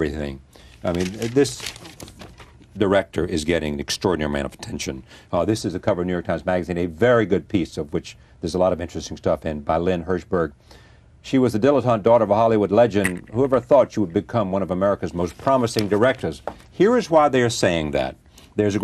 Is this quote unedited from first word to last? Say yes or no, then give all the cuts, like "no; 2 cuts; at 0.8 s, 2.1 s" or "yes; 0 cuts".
no; 1 cut; at 5.9 s